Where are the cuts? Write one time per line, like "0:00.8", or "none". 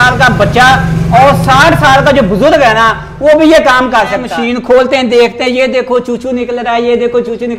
0:04.3